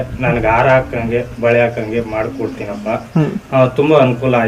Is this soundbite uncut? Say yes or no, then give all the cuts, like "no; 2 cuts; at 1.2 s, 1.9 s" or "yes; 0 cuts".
no; 1 cut; at 3.4 s